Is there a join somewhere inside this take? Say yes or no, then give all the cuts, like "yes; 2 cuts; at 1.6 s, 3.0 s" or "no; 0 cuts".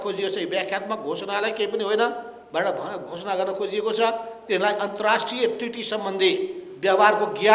no; 0 cuts